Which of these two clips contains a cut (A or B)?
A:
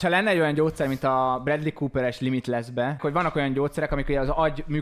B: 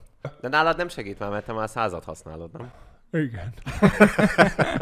A